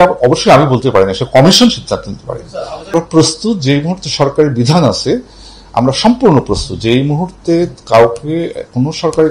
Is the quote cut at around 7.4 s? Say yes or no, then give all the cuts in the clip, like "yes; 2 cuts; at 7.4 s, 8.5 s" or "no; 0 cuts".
no; 1 cut; at 2.9 s